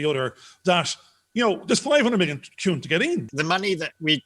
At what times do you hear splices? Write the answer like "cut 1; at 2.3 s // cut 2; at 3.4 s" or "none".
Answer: cut 1; at 3.3 s